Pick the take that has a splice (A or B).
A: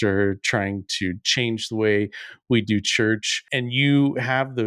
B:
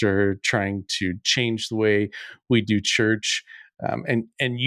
A